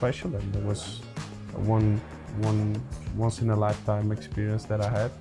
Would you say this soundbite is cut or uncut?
uncut